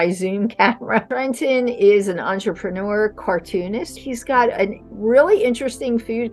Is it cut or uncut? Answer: cut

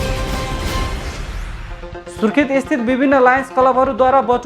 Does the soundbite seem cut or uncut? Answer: cut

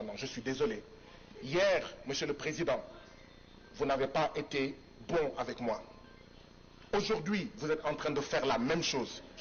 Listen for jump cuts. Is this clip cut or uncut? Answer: uncut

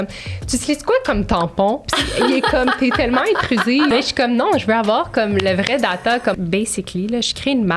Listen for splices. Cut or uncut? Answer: cut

